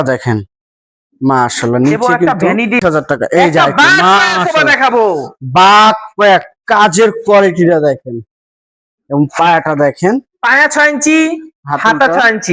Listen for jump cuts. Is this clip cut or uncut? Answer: cut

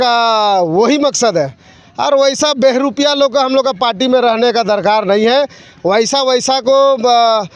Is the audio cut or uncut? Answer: uncut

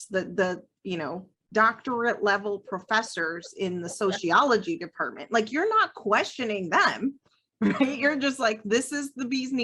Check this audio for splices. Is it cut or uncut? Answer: uncut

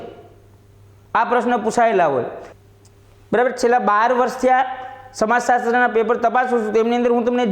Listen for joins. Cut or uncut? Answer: cut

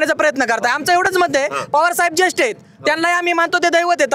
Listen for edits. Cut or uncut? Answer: uncut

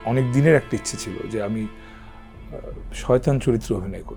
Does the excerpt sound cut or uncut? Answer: uncut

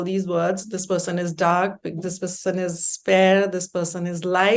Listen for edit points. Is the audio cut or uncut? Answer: uncut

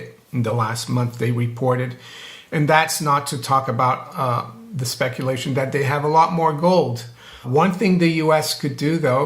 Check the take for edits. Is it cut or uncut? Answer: cut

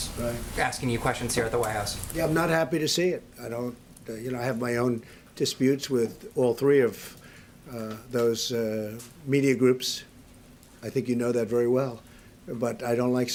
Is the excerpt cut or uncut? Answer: uncut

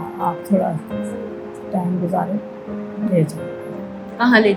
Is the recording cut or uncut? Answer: uncut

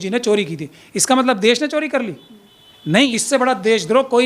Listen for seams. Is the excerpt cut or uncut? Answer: cut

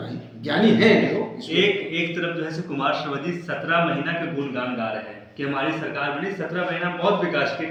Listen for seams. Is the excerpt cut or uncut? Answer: uncut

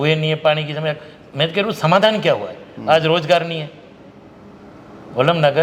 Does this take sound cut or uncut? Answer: uncut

